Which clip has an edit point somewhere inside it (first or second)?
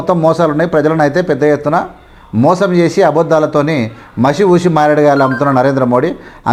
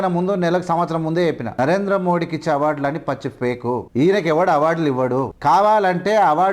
second